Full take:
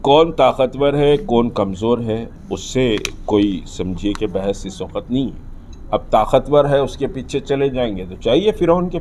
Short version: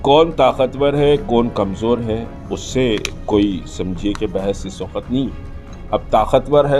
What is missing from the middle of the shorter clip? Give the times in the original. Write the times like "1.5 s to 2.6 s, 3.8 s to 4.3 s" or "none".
none